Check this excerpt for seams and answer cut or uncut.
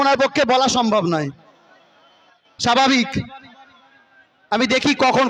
uncut